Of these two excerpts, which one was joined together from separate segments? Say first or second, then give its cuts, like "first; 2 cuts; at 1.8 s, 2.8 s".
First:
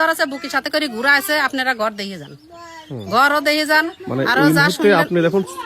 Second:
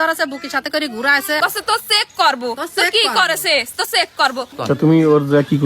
second; 2 cuts; at 1.4 s, 4.5 s